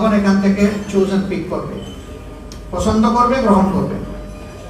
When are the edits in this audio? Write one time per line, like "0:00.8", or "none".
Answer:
none